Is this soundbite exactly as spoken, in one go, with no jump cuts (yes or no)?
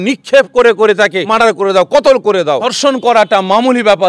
no